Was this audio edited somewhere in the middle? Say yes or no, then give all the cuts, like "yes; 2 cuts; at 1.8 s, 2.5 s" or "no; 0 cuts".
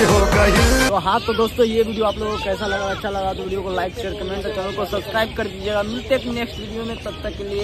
no; 0 cuts